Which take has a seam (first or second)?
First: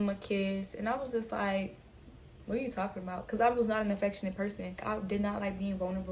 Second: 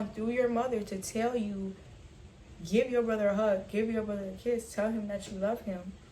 first